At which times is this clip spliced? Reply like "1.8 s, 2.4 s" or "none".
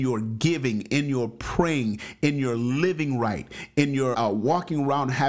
4.1 s